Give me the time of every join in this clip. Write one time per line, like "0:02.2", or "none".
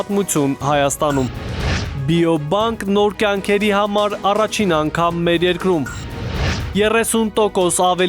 0:01.8